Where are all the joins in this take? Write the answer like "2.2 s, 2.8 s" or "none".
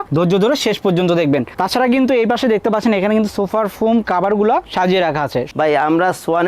5.5 s